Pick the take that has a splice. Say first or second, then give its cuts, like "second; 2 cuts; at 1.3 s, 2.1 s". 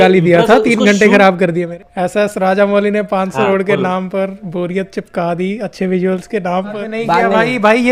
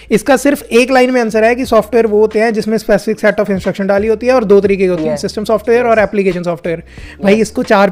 first; 3 cuts; at 1.7 s, 3.5 s, 6.9 s